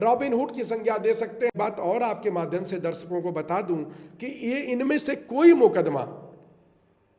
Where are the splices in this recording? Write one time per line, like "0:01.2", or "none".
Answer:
0:01.5